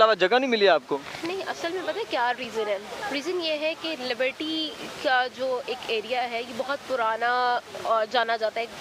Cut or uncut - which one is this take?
uncut